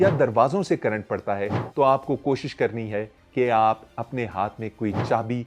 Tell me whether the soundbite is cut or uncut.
uncut